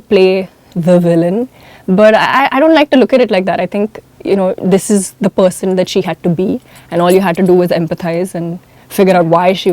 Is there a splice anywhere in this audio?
no; 0 cuts

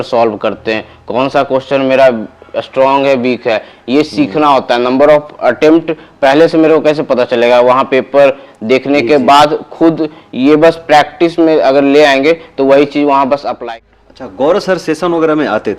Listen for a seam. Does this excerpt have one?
yes; 1 cut; at 13.5 s

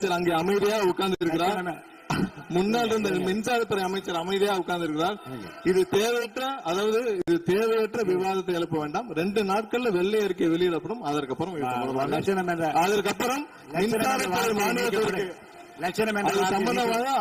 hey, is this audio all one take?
yes; 0 cuts

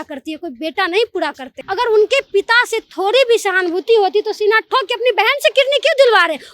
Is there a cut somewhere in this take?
yes; 1 cut; at 1.6 s

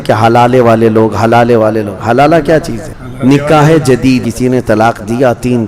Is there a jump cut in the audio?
yes; 1 cut; at 4.3 s

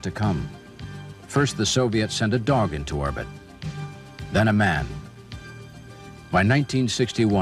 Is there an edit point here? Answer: no; 0 cuts

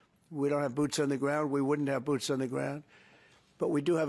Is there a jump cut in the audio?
no; 0 cuts

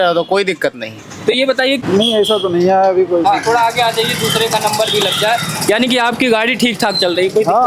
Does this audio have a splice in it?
yes; 1 cut; at 1.8 s

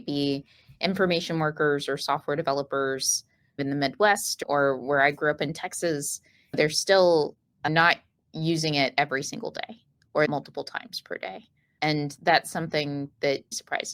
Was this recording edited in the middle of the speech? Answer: no; 0 cuts

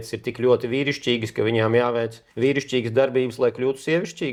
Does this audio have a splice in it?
no; 0 cuts

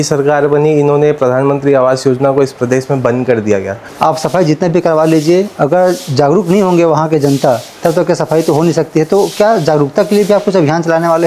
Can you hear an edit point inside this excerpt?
yes; 1 cut; at 3.8 s

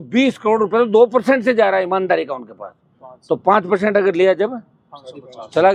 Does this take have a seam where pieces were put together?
no; 0 cuts

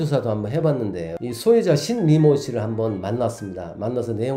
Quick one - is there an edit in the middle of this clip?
yes; 1 cut; at 1.2 s

